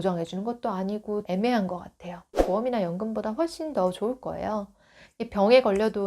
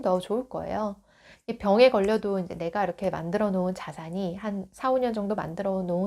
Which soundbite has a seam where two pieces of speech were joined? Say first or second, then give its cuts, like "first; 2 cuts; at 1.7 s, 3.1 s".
first; 1 cut; at 2.4 s